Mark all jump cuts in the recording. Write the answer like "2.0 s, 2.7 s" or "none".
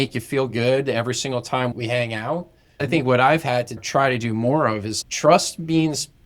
1.8 s, 3.8 s, 4.9 s